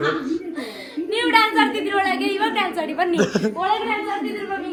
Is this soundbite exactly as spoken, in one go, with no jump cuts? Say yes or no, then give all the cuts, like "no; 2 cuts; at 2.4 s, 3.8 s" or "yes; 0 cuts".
yes; 0 cuts